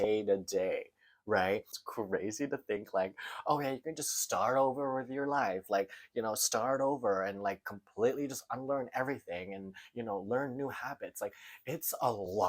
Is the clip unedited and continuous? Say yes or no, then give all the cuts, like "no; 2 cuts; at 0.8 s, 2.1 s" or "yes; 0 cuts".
no; 1 cut; at 1.8 s